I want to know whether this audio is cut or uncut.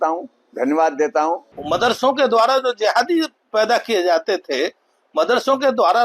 cut